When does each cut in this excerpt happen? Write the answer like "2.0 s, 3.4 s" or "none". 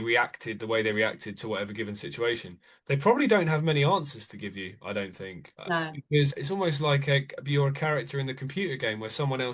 6.4 s